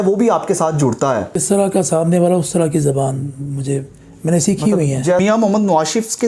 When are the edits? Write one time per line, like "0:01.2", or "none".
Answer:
0:01.4
0:05.2